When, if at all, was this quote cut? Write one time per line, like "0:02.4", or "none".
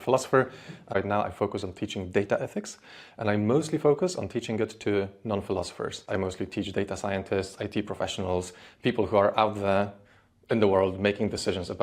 0:01.0
0:06.0